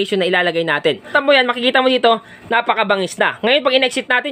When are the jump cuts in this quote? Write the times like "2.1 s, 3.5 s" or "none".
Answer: 1.1 s